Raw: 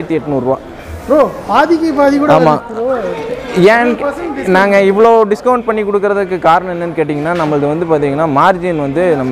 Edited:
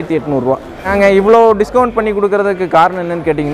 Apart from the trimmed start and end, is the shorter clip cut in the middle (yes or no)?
yes